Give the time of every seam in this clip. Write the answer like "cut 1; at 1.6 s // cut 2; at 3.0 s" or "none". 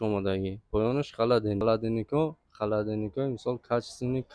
cut 1; at 1.6 s